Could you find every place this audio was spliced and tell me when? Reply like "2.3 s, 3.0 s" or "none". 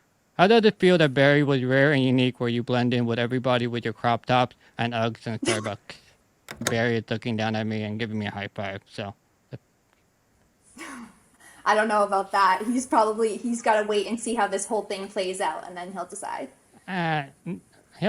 6.6 s